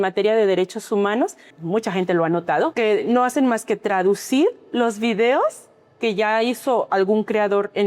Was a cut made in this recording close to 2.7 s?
yes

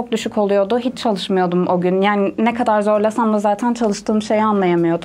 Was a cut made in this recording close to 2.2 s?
no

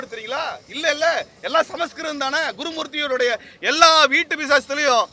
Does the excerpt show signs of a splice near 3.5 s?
no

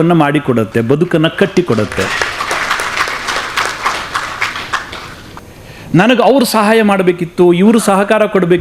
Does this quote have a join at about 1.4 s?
no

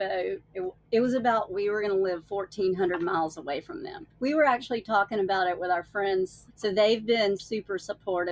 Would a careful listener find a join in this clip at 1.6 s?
no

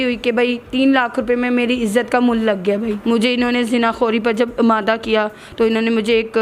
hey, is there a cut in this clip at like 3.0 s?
yes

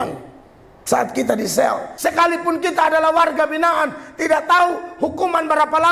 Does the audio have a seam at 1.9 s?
yes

